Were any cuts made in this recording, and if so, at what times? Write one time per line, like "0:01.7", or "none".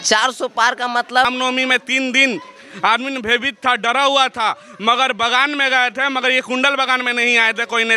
0:01.3